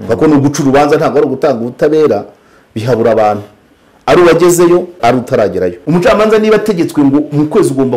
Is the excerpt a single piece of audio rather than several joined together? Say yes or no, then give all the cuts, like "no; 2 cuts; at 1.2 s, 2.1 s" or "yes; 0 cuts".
no; 1 cut; at 5.3 s